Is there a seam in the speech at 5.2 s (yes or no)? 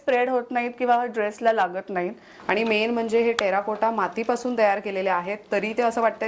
no